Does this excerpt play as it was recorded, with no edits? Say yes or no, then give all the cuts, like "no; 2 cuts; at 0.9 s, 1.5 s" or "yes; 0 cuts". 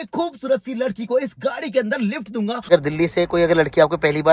no; 1 cut; at 2.7 s